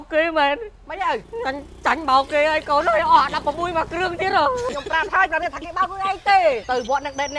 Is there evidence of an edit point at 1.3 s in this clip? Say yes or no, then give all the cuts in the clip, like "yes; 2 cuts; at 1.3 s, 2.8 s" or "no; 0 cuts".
yes; 3 cuts; at 1.3 s, 4.7 s, 6.6 s